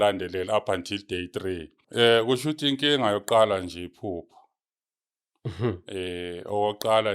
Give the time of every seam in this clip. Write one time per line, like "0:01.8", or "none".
0:01.8